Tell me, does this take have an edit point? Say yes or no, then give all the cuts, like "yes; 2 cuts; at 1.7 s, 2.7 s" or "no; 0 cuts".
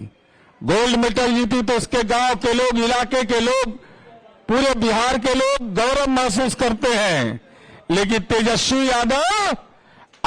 no; 0 cuts